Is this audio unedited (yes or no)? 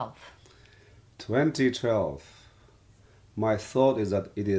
yes